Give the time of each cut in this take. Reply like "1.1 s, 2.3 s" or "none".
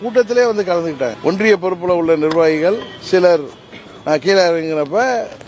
1.2 s